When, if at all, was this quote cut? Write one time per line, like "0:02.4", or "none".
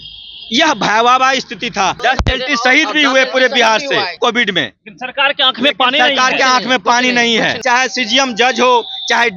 0:02.0
0:04.2
0:07.6